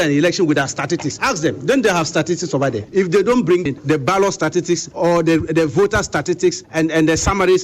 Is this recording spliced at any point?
yes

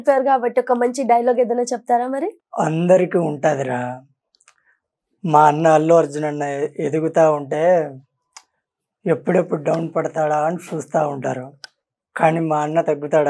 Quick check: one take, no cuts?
no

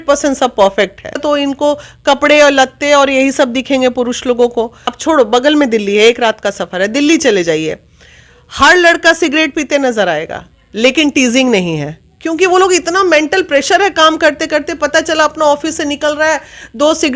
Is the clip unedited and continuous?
no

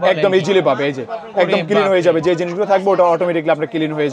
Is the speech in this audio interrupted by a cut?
no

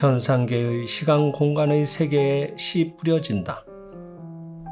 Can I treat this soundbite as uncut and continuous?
no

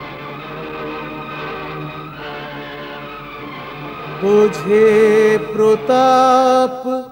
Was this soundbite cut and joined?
no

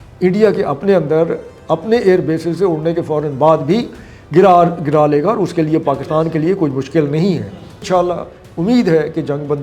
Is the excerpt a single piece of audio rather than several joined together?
no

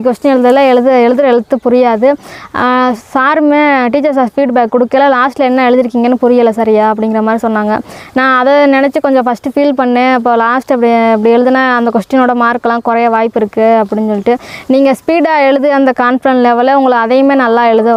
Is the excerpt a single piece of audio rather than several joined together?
yes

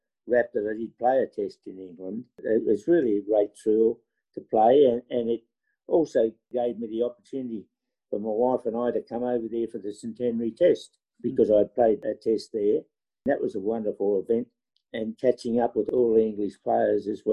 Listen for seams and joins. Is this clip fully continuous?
no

